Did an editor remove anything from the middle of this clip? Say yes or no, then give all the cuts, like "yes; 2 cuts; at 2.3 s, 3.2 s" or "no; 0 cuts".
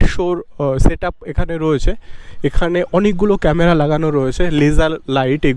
no; 0 cuts